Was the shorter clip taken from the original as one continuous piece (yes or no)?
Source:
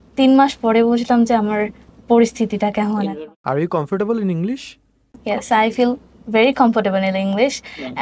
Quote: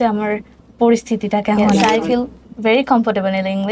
no